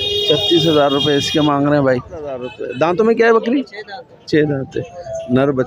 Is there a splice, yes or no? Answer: yes